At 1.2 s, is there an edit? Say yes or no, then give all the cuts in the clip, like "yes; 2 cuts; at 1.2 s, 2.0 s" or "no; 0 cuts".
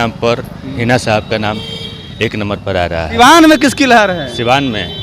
no; 1 cut; at 3.1 s